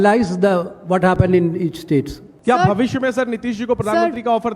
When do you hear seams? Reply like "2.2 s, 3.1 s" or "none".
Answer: 2.2 s